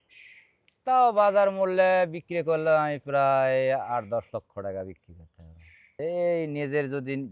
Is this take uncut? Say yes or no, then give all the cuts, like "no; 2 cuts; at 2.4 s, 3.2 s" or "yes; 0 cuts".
yes; 0 cuts